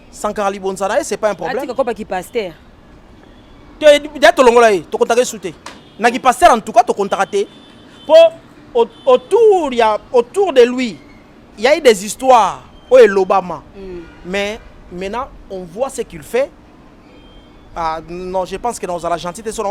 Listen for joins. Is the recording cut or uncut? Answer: uncut